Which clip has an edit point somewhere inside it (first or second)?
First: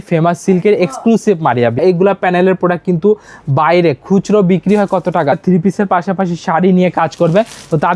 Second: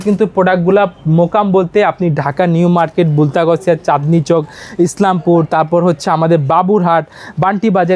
first